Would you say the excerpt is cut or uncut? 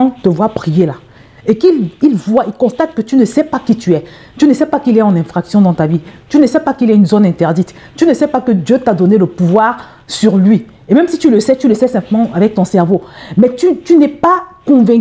uncut